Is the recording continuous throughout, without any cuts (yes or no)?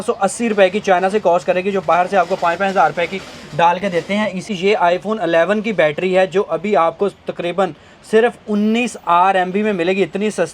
no